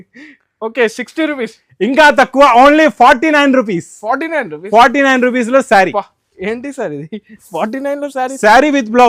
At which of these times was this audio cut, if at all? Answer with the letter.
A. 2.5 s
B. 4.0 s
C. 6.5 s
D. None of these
D